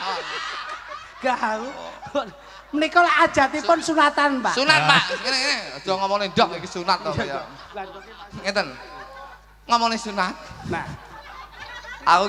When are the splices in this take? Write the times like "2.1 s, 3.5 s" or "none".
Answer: none